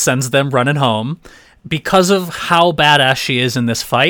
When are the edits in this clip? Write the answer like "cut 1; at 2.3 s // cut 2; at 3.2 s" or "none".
cut 1; at 1.3 s